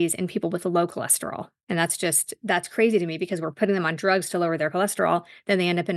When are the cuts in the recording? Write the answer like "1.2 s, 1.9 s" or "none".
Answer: 1.5 s